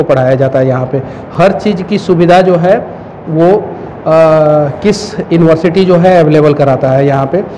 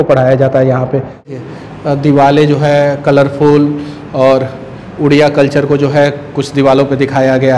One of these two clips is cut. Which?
second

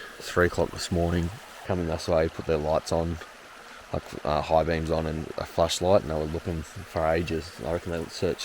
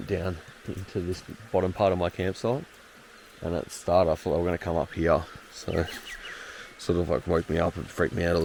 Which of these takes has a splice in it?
first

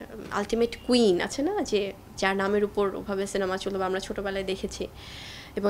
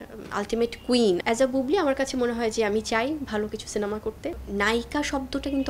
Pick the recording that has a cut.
second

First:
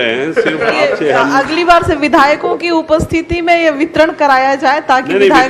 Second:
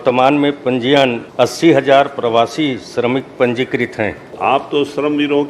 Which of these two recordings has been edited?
second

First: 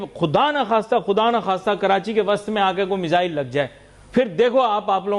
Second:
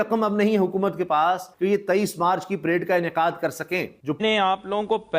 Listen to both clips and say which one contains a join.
second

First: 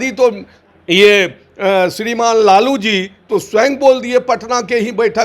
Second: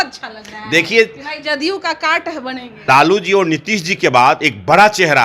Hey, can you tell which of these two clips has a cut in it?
second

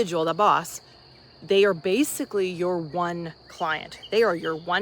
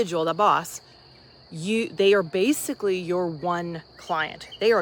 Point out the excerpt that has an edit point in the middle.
first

